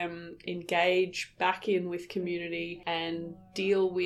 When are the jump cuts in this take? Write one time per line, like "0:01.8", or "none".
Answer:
none